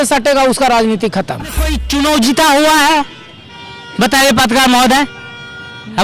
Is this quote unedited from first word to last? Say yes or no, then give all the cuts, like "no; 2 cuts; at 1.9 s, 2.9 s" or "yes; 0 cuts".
no; 1 cut; at 1.7 s